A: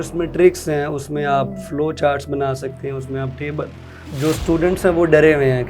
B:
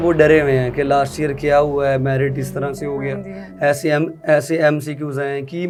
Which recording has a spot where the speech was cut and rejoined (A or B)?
A